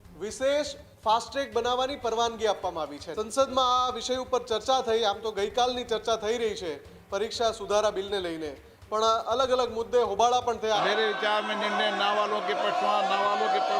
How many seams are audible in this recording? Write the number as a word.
two